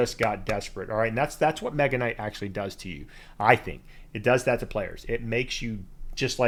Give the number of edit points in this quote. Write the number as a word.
zero